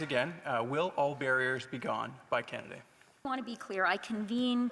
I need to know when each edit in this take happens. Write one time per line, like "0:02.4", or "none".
0:03.3